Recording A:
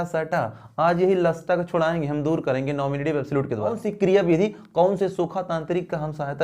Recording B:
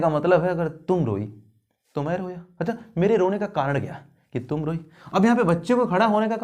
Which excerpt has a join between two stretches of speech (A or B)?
A